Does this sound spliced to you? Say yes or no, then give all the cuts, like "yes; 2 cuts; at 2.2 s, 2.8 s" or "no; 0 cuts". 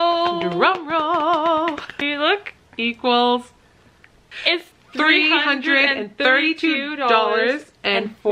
yes; 2 cuts; at 1.9 s, 4.3 s